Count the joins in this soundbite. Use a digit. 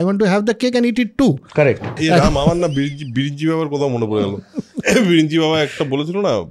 1